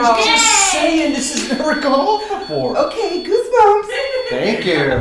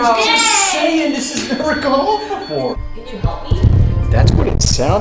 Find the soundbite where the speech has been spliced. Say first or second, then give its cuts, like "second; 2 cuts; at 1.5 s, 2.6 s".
second; 1 cut; at 2.7 s